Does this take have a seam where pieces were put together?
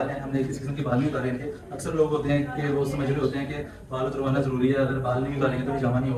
no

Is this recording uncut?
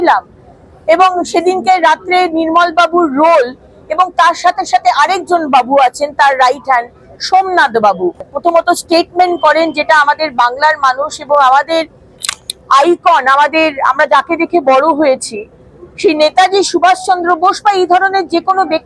no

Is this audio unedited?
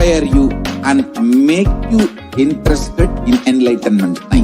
yes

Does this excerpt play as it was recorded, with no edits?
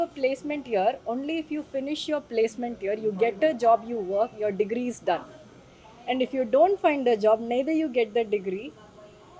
yes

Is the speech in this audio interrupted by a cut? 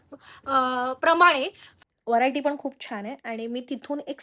yes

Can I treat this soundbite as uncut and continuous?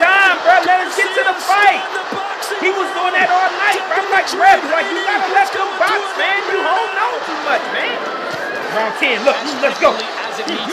yes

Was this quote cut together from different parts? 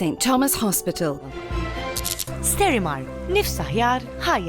yes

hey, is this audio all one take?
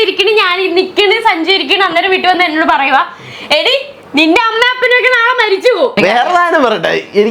no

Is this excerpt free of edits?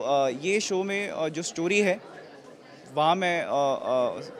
yes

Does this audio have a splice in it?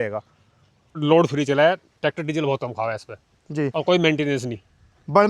yes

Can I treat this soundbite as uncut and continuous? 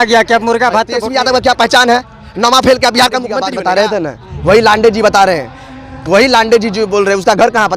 no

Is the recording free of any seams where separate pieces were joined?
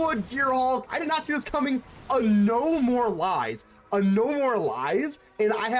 no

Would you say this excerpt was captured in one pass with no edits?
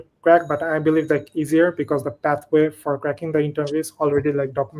yes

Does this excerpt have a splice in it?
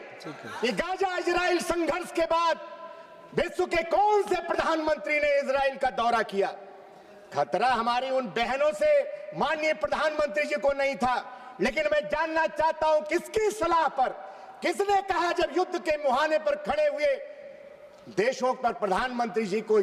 no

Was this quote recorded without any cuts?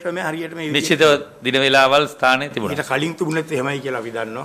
yes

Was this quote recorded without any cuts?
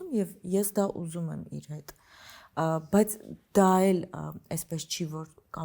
yes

